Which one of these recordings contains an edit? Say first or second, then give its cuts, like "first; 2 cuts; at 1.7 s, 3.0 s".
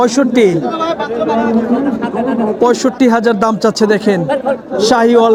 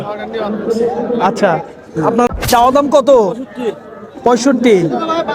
second; 1 cut; at 2.3 s